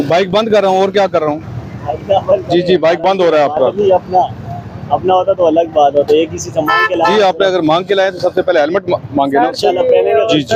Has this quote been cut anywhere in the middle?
no; 0 cuts

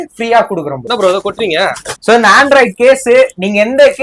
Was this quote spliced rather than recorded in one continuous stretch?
yes; 2 cuts; at 0.8 s, 2.0 s

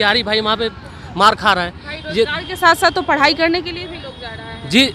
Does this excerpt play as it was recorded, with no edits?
yes; 0 cuts

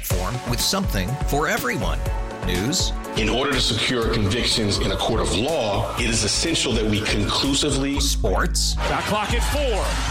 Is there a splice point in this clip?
no; 0 cuts

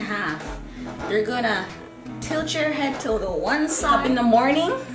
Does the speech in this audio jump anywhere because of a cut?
yes; 1 cut; at 4.0 s

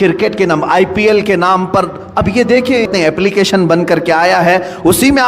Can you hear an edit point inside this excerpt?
yes; 1 cut; at 2.9 s

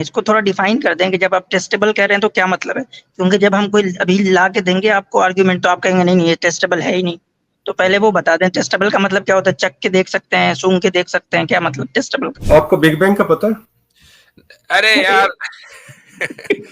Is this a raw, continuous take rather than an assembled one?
no; 1 cut; at 12.4 s

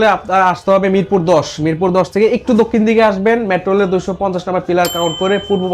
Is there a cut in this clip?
no; 0 cuts

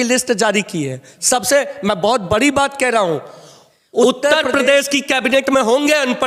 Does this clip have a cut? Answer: yes; 1 cut; at 4.0 s

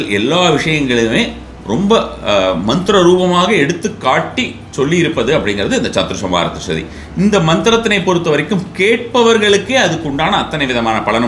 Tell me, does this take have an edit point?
no; 0 cuts

